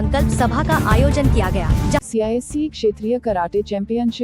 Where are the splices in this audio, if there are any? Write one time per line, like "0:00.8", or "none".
0:02.0